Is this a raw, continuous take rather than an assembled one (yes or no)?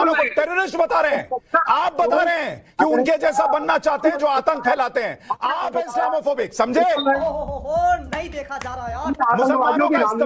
yes